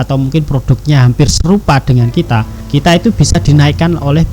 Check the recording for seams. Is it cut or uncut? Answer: cut